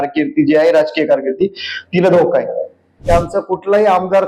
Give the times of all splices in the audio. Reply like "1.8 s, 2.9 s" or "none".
2.9 s

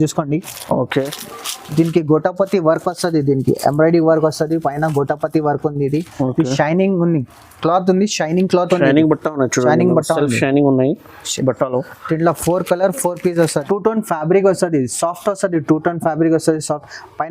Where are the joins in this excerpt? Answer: 0.9 s, 13.6 s

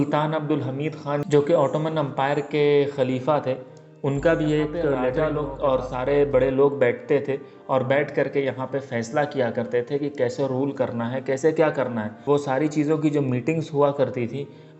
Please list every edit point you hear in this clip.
5.1 s

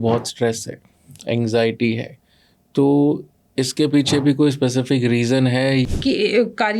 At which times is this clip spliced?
5.9 s

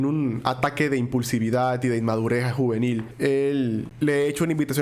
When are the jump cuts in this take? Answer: 3.1 s, 3.9 s

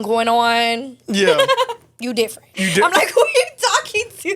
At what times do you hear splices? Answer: none

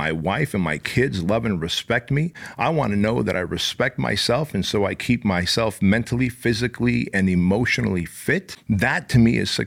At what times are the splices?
8.5 s

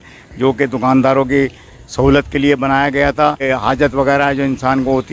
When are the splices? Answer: none

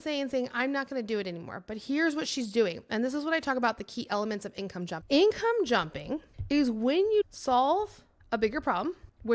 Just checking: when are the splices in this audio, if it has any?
4.9 s

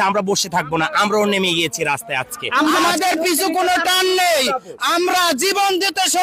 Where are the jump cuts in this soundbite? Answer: 2.7 s

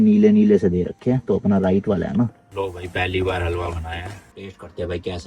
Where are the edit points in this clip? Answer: 2.5 s, 4.2 s

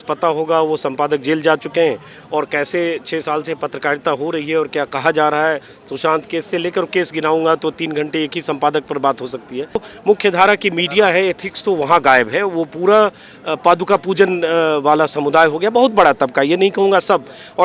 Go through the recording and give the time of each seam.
9.9 s

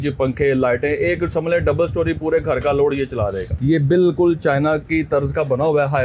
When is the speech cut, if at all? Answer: 3.5 s

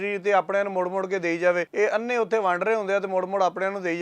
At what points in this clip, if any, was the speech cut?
1.7 s

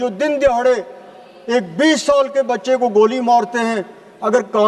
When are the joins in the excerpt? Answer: none

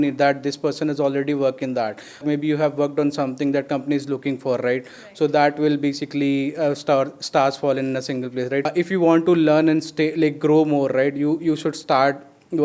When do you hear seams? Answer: 2.2 s, 8.7 s

